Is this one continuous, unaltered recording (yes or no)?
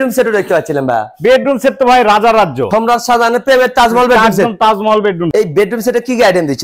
no